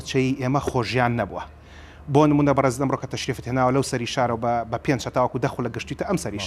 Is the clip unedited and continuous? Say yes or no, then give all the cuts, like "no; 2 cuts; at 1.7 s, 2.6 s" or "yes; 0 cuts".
yes; 0 cuts